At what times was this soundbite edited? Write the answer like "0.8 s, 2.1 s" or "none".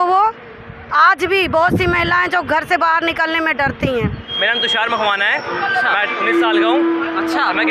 4.3 s